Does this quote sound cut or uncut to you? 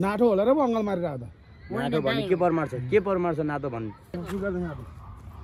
cut